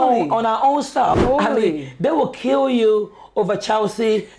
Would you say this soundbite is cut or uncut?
cut